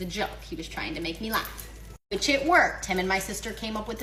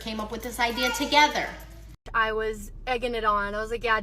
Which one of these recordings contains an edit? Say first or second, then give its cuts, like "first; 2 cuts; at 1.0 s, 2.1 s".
second; 1 cut; at 2.0 s